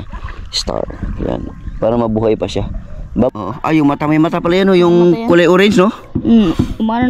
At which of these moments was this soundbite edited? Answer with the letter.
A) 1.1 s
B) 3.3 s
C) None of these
B